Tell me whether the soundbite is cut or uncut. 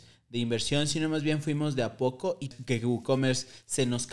cut